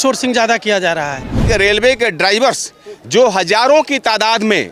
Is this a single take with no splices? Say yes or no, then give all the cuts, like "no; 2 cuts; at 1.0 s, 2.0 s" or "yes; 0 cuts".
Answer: no; 1 cut; at 1.4 s